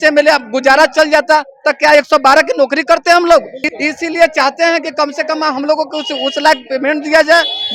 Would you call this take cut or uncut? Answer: uncut